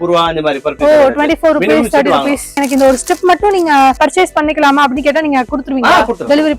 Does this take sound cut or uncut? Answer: cut